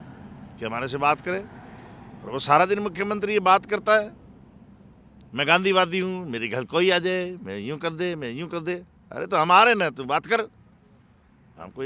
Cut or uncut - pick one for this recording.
uncut